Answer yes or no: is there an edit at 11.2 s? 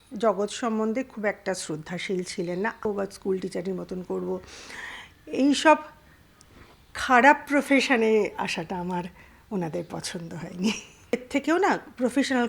yes